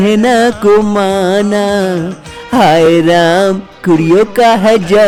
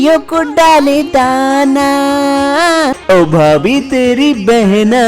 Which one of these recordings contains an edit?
second; 1 cut; at 3.0 s

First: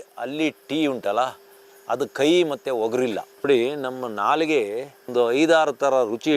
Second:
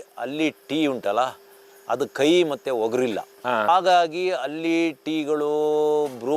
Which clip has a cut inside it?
first; 1 cut; at 3.3 s

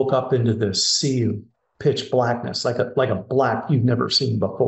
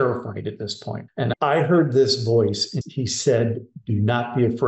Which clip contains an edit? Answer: second; 2 cuts; at 0.9 s, 2.7 s

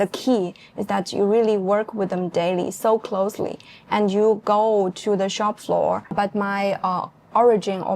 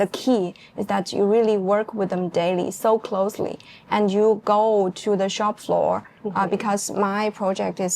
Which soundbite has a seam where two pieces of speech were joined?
first; 1 cut; at 6.1 s

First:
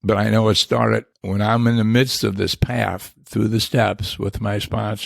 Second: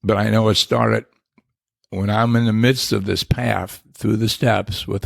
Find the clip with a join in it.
first; 1 cut; at 1.2 s

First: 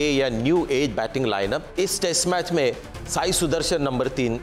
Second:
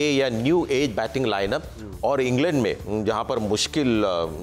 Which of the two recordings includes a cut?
first; 1 cut; at 1.7 s

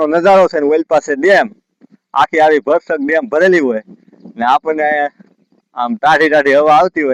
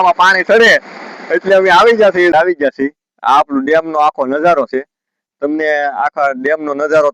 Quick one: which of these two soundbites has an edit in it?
second; 1 cut; at 2.3 s

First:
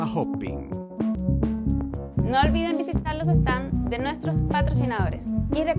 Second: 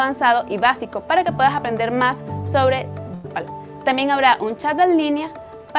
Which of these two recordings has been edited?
first; 1 cut; at 1.2 s

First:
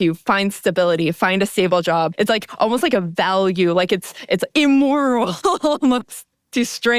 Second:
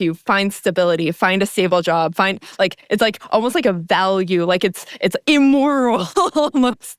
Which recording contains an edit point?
first; 1 cut; at 2.1 s

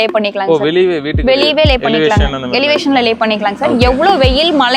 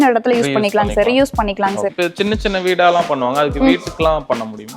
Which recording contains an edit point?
second; 1 cut; at 1.9 s

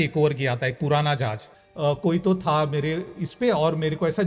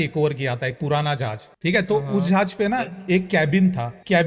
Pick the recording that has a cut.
first; 1 cut; at 1.5 s

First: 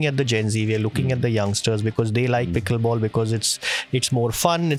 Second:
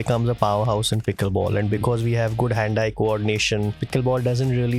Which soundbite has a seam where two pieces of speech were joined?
second; 1 cut; at 3.8 s

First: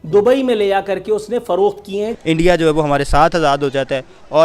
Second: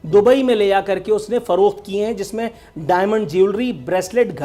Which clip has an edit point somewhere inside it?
first; 1 cut; at 2.2 s

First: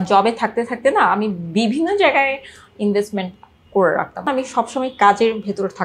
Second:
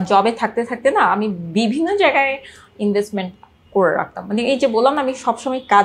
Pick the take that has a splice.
first; 1 cut; at 4.3 s

